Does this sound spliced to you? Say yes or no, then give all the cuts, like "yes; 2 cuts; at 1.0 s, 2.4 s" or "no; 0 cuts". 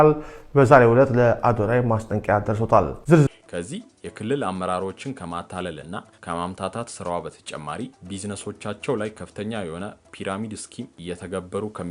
yes; 1 cut; at 3.2 s